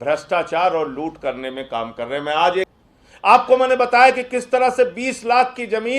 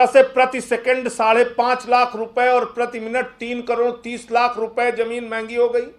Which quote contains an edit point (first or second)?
first